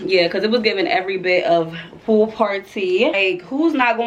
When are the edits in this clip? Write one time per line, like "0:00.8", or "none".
0:03.2